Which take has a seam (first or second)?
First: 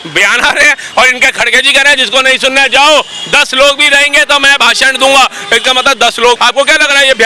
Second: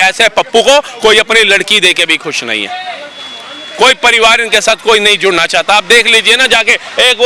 first